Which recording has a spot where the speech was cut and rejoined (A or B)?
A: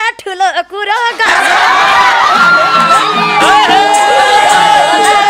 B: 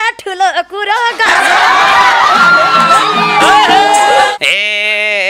B